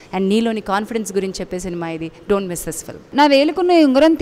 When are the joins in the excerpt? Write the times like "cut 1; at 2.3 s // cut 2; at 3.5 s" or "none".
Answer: cut 1; at 3.1 s

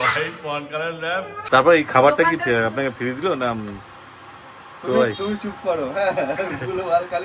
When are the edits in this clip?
cut 1; at 1.4 s

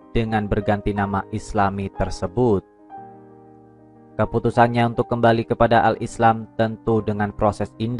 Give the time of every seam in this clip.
cut 1; at 2.7 s // cut 2; at 4.1 s

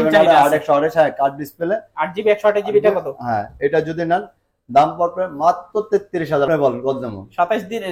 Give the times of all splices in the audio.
cut 1; at 6.5 s

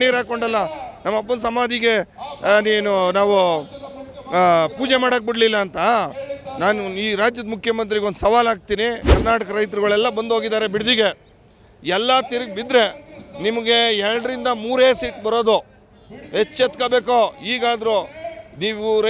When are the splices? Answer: cut 1; at 9.1 s

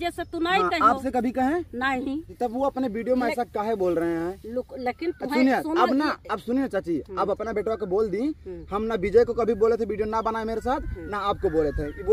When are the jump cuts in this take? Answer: none

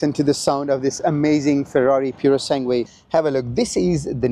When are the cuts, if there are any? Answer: cut 1; at 3.0 s

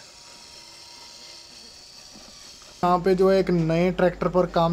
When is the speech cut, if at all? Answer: cut 1; at 2.8 s

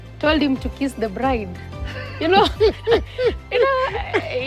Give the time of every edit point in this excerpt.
none

